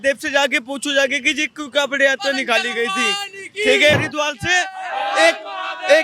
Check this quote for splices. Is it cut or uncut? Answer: cut